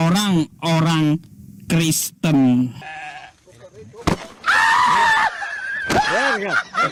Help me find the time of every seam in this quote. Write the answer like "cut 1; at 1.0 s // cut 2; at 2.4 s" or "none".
none